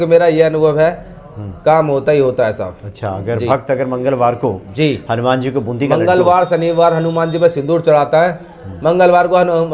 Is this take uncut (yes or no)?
yes